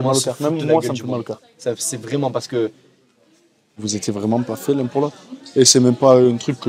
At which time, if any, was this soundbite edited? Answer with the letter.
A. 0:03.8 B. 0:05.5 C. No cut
A